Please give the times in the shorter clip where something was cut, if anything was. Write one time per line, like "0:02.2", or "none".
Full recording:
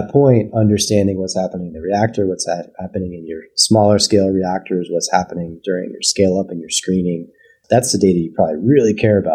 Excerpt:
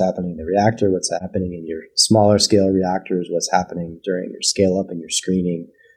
0:01.2